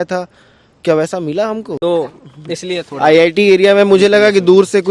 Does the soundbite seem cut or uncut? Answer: cut